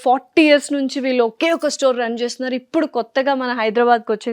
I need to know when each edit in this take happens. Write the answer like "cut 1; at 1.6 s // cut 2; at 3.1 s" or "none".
none